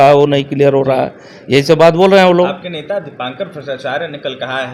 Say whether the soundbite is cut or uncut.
uncut